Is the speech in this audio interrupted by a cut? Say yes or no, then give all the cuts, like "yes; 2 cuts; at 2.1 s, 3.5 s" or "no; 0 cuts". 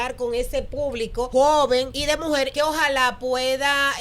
yes; 2 cuts; at 1.3 s, 2.2 s